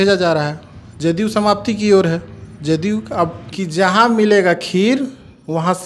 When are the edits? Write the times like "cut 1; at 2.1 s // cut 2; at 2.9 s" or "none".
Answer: cut 1; at 3.4 s